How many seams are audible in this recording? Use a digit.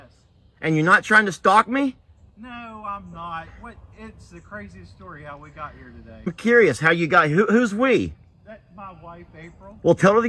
1